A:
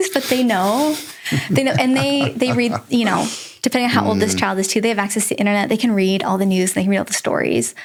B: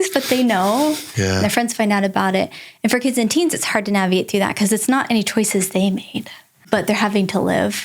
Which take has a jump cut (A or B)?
B